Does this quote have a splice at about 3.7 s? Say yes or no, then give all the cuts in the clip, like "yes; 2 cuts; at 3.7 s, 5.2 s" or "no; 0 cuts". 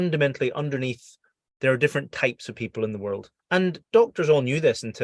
yes; 1 cut; at 3.7 s